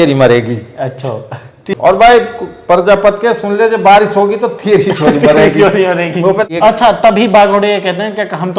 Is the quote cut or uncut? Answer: cut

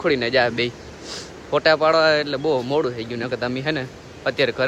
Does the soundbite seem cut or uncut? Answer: uncut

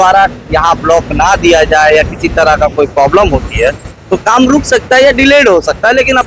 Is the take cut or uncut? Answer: uncut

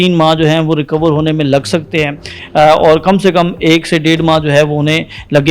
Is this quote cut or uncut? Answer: uncut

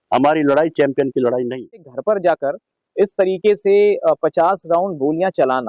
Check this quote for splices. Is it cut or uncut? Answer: cut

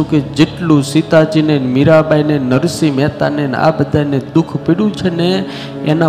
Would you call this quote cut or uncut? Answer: uncut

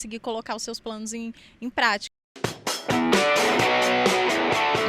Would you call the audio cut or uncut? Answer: cut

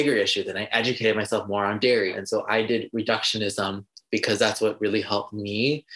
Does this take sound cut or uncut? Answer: cut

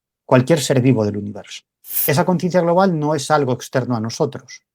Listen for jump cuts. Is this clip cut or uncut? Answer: cut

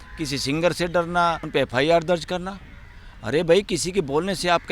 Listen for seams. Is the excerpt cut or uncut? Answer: cut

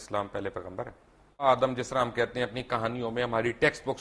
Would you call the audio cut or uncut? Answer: cut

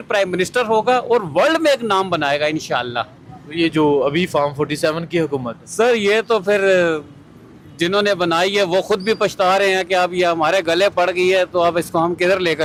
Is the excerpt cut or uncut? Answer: uncut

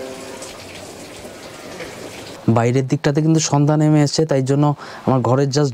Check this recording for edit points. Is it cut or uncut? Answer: cut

